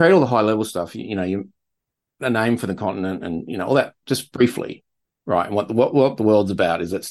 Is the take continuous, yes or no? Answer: yes